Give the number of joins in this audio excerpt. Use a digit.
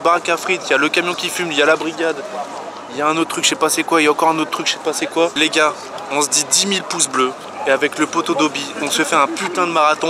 1